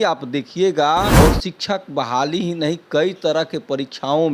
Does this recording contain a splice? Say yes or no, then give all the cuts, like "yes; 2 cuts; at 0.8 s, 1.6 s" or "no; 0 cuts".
yes; 1 cut; at 1.1 s